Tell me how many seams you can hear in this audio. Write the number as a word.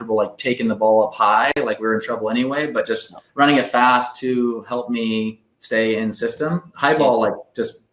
one